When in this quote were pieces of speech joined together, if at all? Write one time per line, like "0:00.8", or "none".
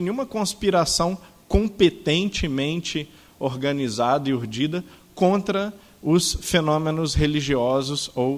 none